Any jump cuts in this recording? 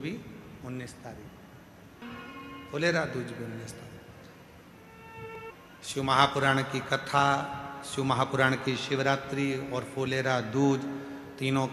yes; 2 cuts; at 2.0 s, 5.3 s

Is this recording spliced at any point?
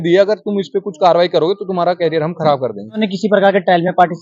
yes; 1 cut; at 3.0 s

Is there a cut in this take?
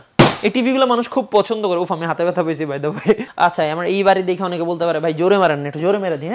yes; 1 cut; at 3.3 s

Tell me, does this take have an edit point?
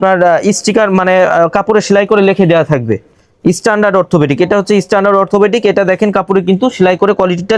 no; 0 cuts

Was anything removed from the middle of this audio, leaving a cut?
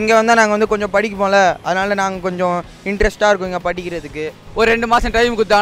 yes; 1 cut; at 4.4 s

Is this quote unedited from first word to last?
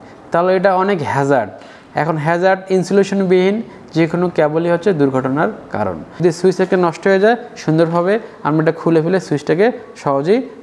no; 1 cut; at 6.1 s

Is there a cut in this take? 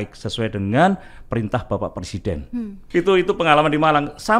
no; 0 cuts

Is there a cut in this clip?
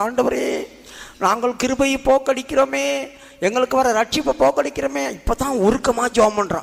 no; 0 cuts

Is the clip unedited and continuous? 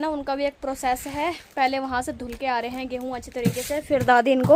yes; 0 cuts

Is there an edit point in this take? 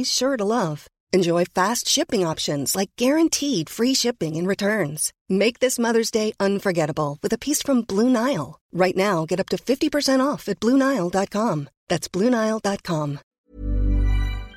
yes; 1 cut; at 13.3 s

